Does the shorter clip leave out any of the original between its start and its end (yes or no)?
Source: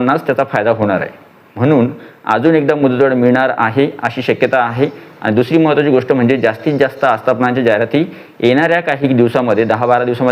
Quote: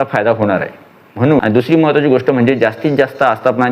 yes